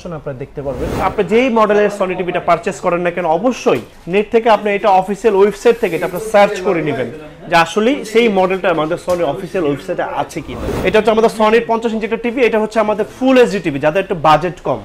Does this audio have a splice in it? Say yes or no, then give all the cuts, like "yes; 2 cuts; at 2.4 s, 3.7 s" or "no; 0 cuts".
yes; 3 cuts; at 1.0 s, 3.9 s, 10.6 s